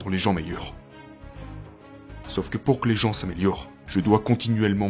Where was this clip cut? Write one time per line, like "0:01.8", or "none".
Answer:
none